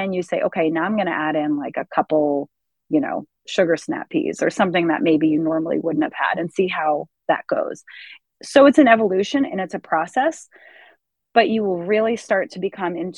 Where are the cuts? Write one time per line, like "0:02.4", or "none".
none